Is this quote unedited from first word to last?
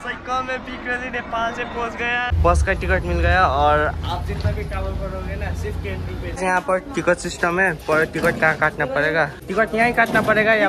no; 3 cuts; at 2.3 s, 6.4 s, 9.4 s

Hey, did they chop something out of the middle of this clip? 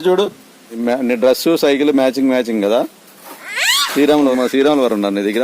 yes; 2 cuts; at 0.8 s, 4.3 s

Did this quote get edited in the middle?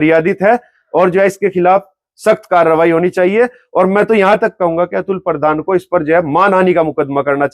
no; 0 cuts

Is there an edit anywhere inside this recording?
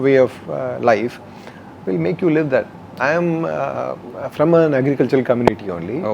yes; 1 cut; at 2.9 s

